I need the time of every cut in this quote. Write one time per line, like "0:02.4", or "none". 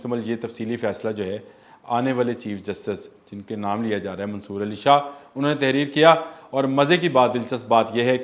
none